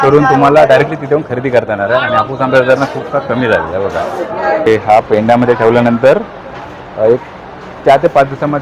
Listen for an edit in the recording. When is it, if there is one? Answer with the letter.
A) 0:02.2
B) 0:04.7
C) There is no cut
B